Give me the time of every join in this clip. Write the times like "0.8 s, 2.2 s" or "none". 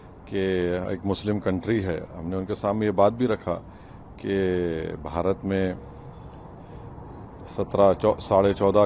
none